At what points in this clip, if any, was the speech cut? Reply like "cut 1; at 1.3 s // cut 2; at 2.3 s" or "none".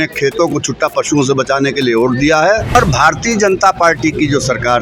cut 1; at 2.8 s